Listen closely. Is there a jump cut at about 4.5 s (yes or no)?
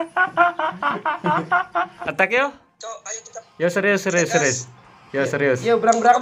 no